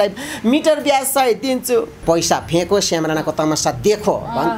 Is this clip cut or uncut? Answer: cut